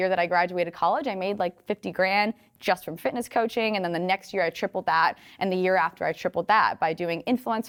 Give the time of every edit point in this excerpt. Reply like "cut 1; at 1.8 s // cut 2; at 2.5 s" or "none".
none